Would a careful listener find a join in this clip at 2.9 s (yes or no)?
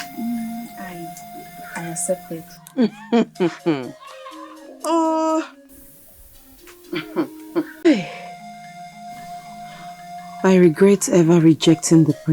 no